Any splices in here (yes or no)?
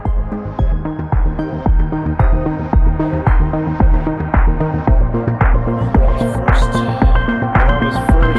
no